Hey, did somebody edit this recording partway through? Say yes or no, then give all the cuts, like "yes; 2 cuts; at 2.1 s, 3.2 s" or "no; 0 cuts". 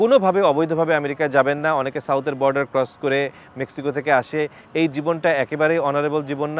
no; 0 cuts